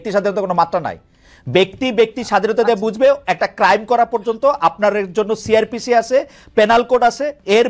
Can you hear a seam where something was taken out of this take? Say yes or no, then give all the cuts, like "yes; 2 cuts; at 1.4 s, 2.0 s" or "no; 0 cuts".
no; 0 cuts